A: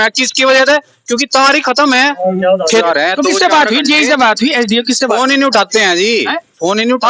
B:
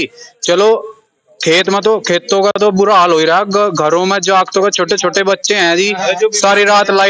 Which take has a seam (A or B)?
A